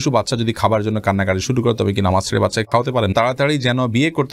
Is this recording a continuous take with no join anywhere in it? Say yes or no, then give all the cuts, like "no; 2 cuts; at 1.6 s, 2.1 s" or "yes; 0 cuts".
no; 1 cut; at 3.1 s